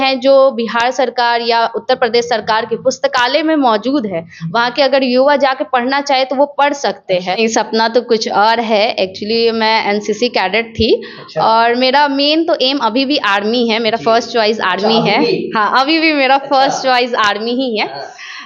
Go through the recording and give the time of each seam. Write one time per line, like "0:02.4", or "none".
0:07.4